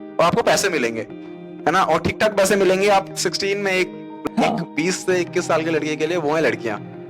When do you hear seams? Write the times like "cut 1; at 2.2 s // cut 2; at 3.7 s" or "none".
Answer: cut 1; at 4.2 s